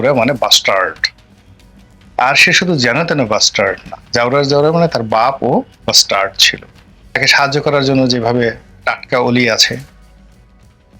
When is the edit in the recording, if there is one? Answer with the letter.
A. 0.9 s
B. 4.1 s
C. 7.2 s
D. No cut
C